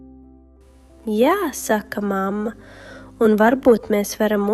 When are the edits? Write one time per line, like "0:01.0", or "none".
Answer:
0:01.0

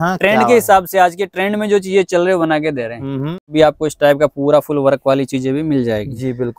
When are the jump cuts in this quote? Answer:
0:03.4

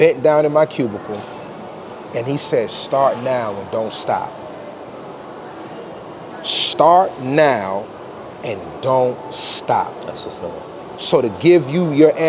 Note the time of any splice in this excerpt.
none

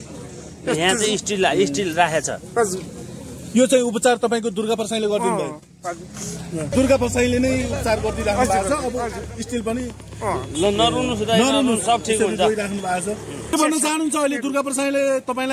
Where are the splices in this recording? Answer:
0:06.7
0:13.5

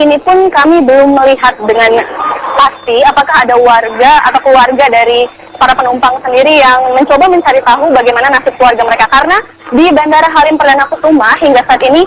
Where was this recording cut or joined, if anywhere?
0:04.2

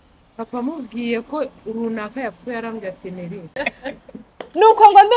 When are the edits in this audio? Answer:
0:03.6

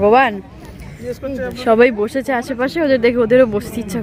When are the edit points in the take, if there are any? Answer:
none

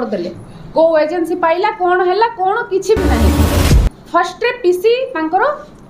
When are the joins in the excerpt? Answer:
0:03.5

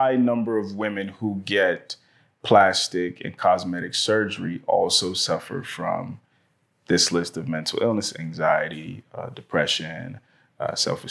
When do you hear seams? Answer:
none

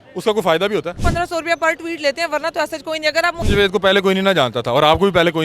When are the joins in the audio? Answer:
0:01.0
0:03.4

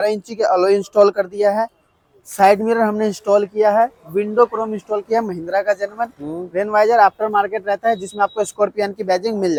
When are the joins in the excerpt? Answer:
none

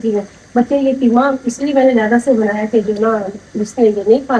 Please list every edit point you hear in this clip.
none

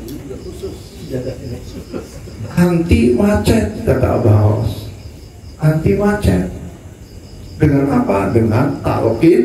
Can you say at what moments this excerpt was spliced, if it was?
none

